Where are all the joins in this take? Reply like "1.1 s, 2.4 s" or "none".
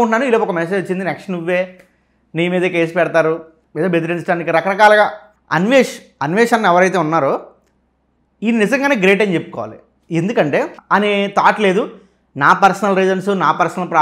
5.4 s, 10.8 s